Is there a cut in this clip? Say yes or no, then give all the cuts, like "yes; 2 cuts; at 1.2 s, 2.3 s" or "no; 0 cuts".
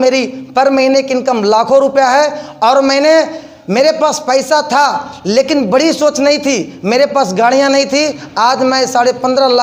no; 0 cuts